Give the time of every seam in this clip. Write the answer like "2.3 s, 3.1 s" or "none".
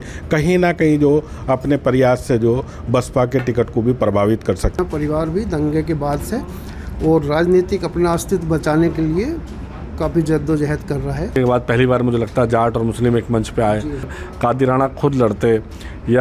4.8 s, 11.4 s, 14.2 s